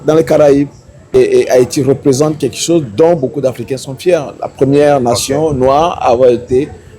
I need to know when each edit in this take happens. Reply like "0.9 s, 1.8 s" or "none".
1.1 s